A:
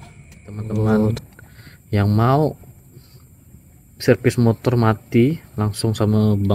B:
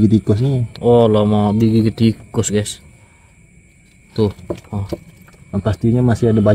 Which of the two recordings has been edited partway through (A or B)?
A